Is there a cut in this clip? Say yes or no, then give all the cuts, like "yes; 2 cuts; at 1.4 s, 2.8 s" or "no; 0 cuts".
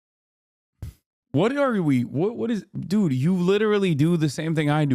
yes; 1 cut; at 1.2 s